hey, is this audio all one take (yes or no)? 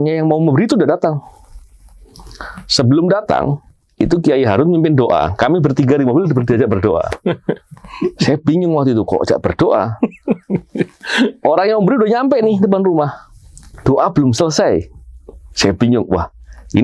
yes